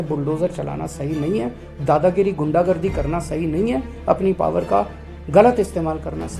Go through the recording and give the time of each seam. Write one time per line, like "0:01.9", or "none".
none